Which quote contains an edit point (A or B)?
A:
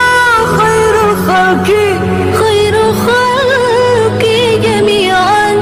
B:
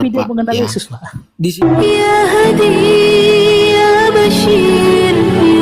B